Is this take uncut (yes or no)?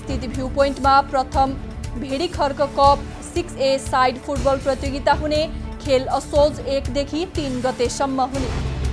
yes